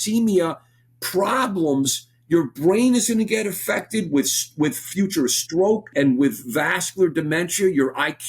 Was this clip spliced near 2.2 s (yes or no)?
no